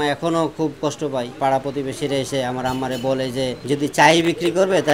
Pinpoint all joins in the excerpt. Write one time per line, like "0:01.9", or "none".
0:01.4
0:03.6